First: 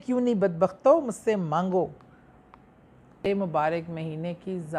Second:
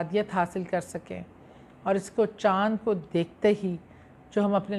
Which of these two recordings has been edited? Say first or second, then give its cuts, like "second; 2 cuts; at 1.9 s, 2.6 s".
first; 1 cut; at 3.2 s